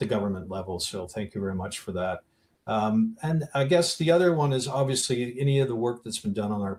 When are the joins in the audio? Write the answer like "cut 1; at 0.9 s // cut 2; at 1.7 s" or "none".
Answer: none